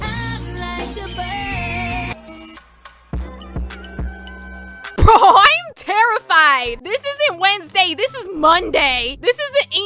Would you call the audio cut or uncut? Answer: cut